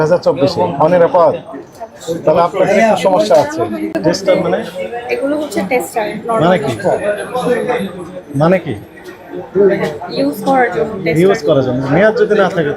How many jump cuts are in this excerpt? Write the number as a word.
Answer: one